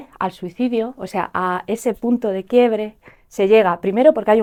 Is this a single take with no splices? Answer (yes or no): yes